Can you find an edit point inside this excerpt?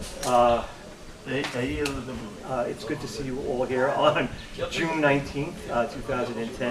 yes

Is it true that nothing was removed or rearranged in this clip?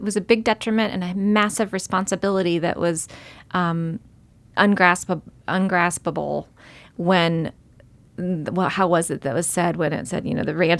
yes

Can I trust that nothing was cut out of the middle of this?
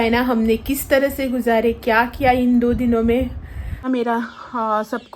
no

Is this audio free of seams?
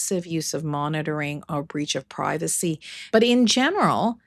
no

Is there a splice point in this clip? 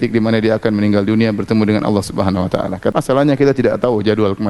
yes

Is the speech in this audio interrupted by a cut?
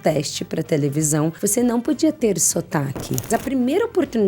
yes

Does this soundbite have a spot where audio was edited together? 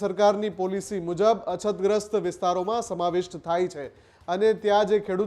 no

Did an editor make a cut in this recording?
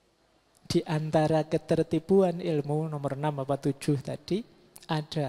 no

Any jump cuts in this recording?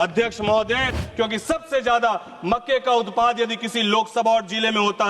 yes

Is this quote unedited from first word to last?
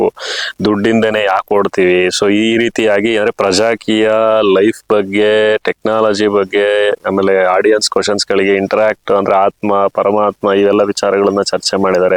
yes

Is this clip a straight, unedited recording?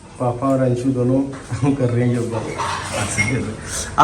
yes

